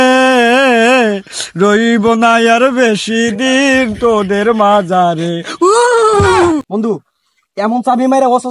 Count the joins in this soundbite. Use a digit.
1